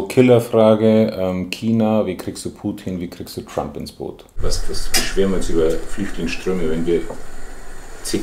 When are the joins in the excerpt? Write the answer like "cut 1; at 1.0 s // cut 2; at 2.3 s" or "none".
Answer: cut 1; at 4.4 s